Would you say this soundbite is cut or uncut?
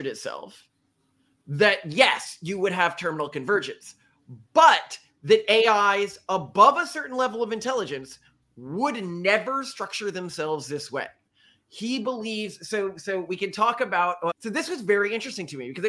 uncut